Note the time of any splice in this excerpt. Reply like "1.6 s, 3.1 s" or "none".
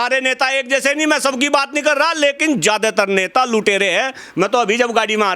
none

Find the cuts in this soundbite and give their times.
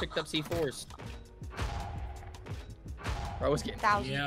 0.9 s

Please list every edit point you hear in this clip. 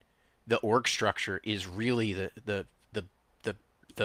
none

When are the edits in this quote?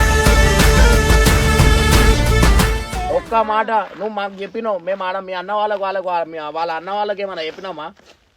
none

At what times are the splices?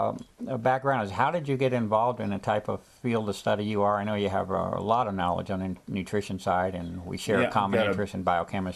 1.4 s

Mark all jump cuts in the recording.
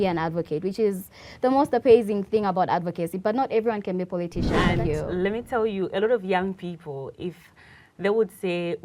4.6 s

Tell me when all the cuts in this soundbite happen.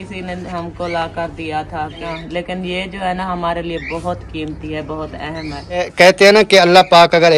2.3 s, 5.9 s

